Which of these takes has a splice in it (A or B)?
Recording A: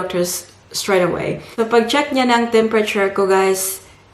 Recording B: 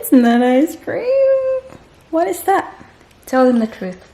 A